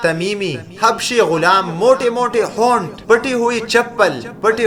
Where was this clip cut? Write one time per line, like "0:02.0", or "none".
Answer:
none